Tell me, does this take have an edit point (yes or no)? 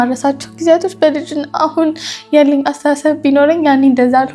no